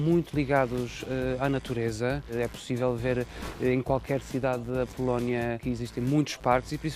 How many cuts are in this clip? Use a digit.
2